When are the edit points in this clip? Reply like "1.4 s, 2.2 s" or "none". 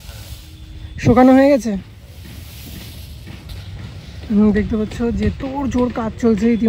none